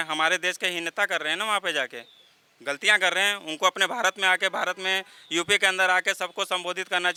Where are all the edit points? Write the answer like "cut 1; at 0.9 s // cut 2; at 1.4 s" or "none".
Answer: none